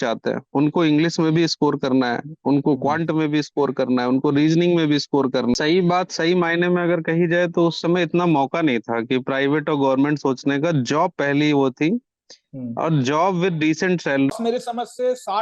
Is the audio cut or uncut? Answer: cut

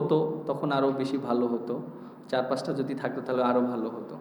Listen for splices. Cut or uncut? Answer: uncut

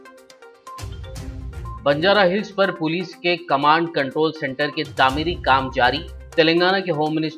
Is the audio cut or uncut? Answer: cut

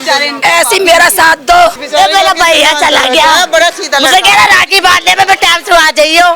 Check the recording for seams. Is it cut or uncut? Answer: cut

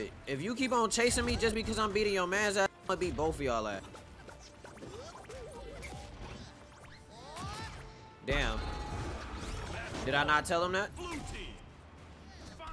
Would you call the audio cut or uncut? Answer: uncut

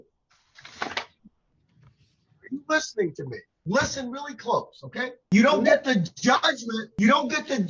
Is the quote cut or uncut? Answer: cut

